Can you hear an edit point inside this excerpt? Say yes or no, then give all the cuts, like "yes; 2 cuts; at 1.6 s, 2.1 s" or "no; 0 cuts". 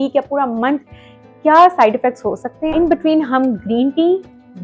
yes; 1 cut; at 2.7 s